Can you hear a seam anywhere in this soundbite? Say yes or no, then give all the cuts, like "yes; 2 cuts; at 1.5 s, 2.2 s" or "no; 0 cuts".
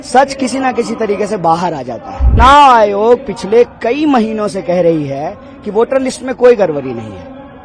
yes; 1 cut; at 2.4 s